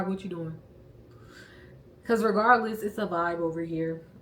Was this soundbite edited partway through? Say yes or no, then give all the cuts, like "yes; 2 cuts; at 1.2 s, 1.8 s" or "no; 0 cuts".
no; 0 cuts